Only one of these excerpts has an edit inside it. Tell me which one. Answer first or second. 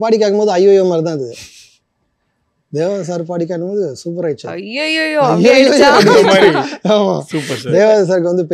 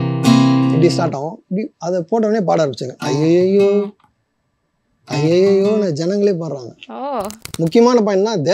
second